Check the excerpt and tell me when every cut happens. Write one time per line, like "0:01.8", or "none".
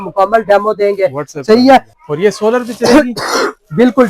0:01.9